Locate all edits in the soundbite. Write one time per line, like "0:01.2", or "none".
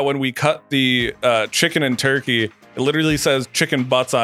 none

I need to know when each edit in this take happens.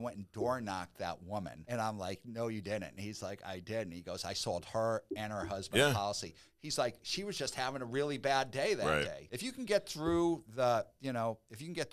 0:01.6
0:09.2

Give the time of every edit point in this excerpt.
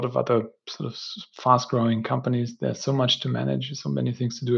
none

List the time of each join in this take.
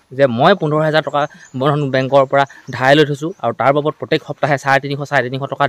none

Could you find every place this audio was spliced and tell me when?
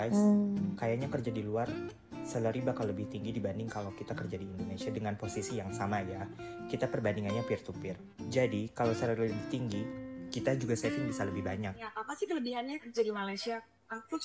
0:11.9

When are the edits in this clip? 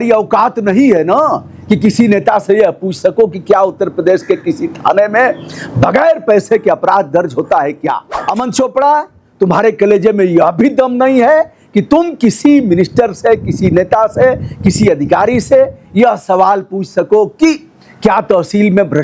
0:08.2

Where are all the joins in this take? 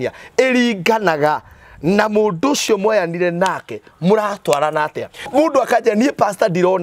0:05.3

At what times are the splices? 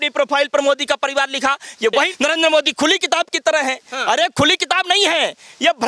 0:01.9

